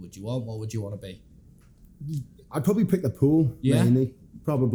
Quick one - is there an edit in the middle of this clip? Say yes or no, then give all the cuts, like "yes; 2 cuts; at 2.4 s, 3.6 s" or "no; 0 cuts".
no; 0 cuts